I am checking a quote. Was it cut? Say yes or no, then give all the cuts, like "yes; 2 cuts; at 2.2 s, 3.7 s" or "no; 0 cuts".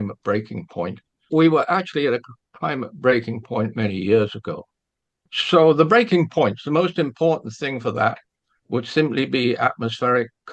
no; 0 cuts